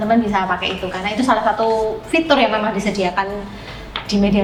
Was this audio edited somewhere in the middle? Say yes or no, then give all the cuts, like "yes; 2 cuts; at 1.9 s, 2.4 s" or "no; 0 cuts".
no; 0 cuts